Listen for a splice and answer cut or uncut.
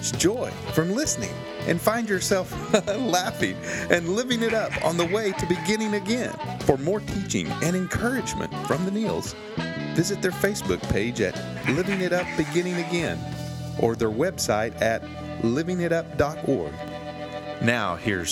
uncut